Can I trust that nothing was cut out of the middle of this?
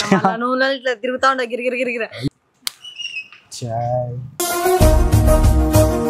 no; 2 cuts; at 2.2 s, 3.9 s

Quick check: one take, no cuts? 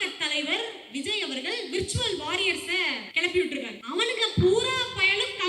no; 2 cuts; at 3.0 s, 3.8 s

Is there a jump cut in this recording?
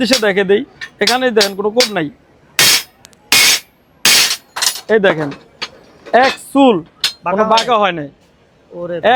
no; 0 cuts

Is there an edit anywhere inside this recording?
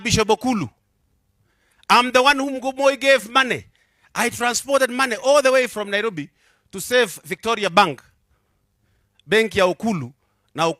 no; 0 cuts

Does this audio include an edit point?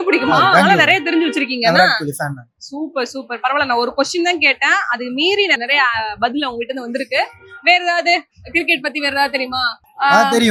no; 0 cuts

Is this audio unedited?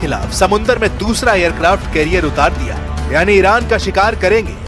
no; 1 cut; at 3.4 s

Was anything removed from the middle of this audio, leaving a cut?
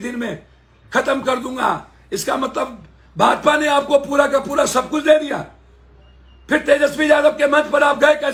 no; 0 cuts

